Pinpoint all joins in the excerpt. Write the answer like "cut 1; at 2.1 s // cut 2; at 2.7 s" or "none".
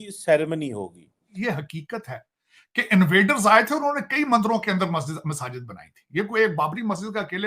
cut 1; at 1.3 s